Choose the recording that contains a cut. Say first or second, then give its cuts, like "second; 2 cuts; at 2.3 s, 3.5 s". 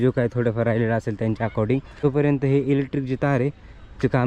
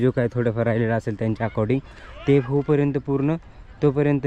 first; 1 cut; at 1.9 s